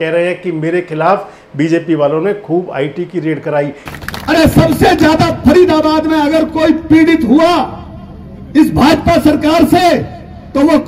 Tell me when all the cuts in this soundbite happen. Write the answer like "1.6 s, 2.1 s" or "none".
3.8 s